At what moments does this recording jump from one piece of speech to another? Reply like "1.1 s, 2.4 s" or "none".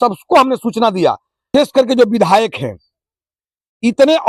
1.5 s